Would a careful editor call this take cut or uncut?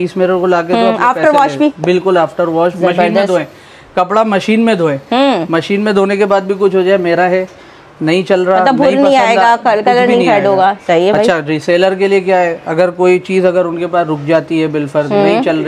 uncut